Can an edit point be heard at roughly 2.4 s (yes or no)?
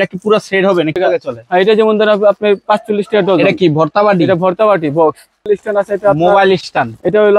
no